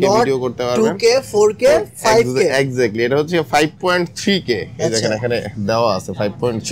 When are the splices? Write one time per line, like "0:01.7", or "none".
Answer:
none